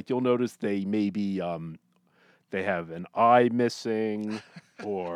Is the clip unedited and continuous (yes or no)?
yes